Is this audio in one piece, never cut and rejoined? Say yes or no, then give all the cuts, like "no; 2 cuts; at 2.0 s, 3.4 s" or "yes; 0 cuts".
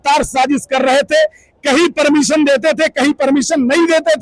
yes; 0 cuts